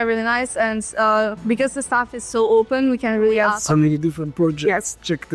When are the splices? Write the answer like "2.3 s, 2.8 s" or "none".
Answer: 3.5 s